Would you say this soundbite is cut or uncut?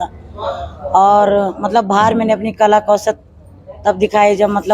uncut